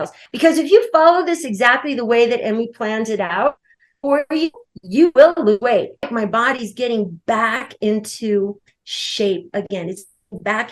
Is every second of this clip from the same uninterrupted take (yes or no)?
no